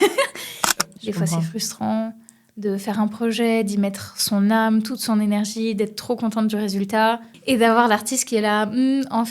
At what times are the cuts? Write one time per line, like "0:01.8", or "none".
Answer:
0:00.9
0:07.3